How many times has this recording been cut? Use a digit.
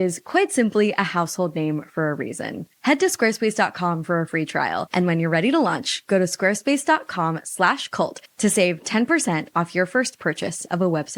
0